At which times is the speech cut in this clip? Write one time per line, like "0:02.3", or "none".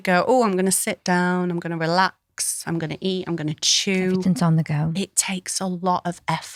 none